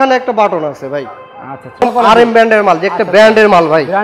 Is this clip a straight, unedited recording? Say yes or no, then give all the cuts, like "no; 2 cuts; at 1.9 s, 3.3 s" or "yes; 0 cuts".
no; 1 cut; at 1.8 s